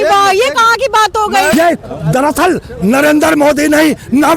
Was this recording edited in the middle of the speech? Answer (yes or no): yes